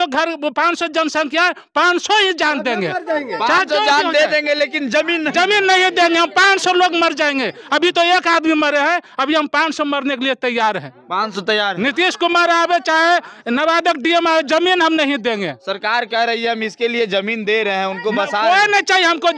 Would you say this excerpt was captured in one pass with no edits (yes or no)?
yes